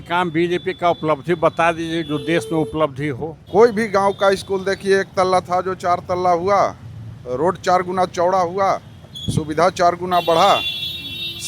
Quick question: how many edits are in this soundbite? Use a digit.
1